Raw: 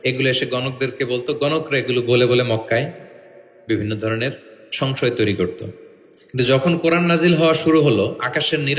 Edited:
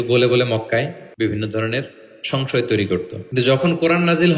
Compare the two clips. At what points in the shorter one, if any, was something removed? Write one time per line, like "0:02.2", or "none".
0:01.0
0:03.2